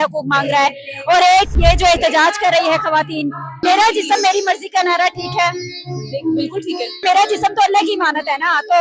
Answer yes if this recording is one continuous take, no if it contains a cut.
no